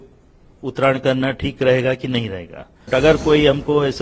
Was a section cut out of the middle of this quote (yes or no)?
yes